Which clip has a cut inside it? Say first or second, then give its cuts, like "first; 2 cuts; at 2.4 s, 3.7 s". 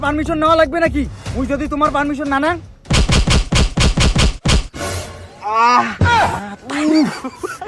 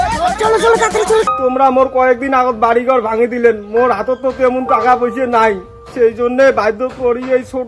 second; 1 cut; at 1.3 s